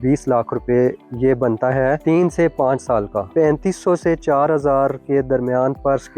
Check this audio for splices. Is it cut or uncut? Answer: cut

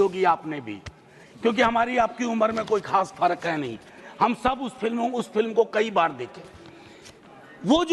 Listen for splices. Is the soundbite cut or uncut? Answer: uncut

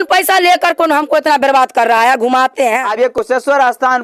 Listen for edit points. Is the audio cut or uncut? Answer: cut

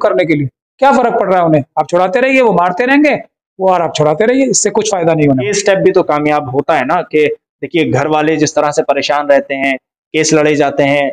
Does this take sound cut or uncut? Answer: cut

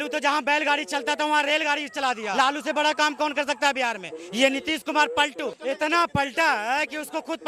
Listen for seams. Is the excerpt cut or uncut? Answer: cut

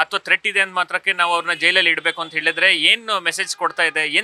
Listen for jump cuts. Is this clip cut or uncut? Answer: uncut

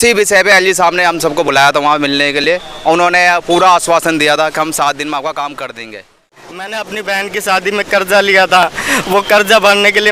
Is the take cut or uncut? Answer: cut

